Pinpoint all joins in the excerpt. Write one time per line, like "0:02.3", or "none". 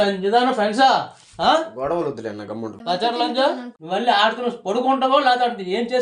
0:02.7
0:03.7